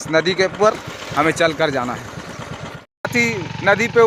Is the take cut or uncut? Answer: cut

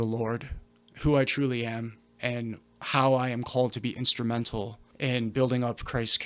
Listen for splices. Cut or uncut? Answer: cut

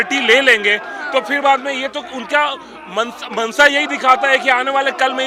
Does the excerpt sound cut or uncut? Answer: uncut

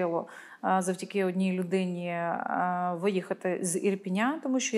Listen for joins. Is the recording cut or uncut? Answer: uncut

